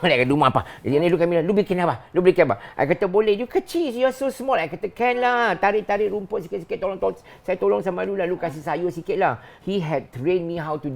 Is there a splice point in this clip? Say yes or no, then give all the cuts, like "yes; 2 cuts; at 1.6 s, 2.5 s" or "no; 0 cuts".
no; 0 cuts